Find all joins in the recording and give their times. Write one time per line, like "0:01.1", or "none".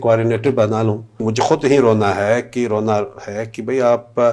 0:01.3